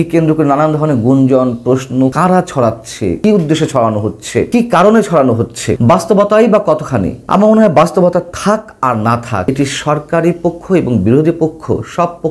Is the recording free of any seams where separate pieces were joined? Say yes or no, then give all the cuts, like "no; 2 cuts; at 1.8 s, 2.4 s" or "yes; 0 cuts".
no; 6 cuts; at 2.1 s, 3.2 s, 4.5 s, 5.6 s, 7.1 s, 9.5 s